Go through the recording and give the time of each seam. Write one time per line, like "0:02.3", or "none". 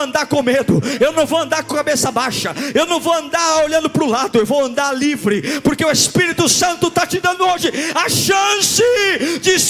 none